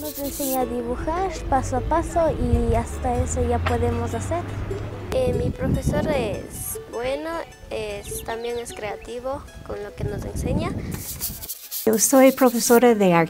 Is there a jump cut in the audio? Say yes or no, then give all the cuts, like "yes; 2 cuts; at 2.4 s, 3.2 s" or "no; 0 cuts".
yes; 1 cut; at 11.9 s